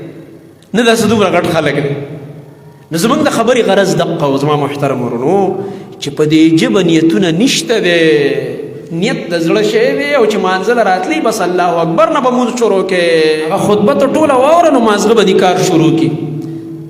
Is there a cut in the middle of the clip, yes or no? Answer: yes